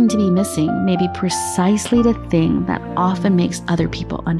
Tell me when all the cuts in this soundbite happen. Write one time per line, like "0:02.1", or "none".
none